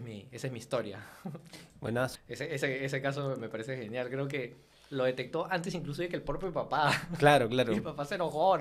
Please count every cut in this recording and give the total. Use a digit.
1